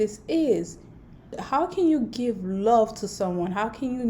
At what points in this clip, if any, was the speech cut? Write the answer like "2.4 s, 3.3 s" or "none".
1.4 s